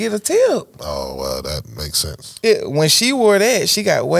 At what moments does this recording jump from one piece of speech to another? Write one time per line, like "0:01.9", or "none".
none